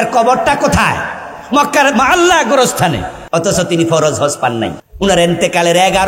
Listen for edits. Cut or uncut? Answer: cut